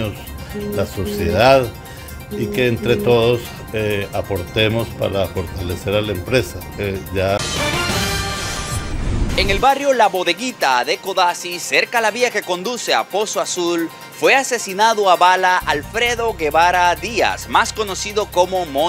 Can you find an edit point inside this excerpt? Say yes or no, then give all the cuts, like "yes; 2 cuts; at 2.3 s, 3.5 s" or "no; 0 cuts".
yes; 1 cut; at 7.4 s